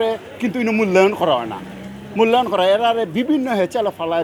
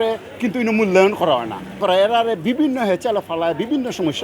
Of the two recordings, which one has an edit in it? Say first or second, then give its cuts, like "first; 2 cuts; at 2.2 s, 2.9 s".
second; 1 cut; at 1.8 s